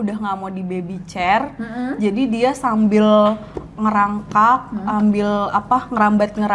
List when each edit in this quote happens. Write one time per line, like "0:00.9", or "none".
none